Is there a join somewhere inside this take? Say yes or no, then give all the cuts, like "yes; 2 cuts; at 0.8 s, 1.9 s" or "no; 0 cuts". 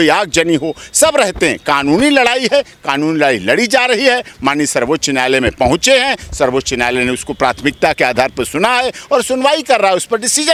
no; 0 cuts